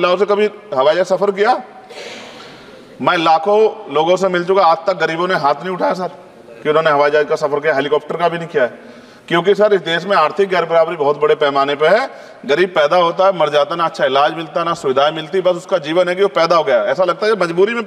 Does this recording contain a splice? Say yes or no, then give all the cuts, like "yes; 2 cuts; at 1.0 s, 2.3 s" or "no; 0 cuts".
no; 0 cuts